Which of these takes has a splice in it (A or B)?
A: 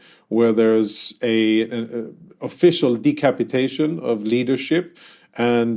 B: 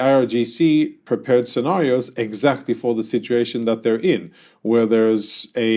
B